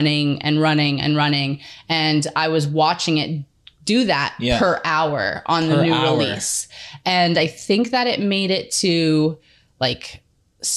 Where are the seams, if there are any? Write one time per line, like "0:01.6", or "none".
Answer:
none